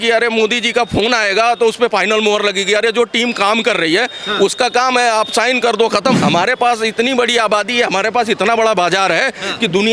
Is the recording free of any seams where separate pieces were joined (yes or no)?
no